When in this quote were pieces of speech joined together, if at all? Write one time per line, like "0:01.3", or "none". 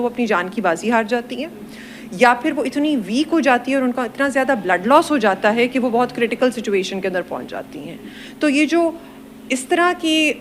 none